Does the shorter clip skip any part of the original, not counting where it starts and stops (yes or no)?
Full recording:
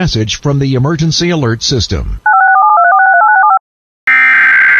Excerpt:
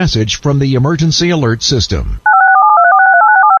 no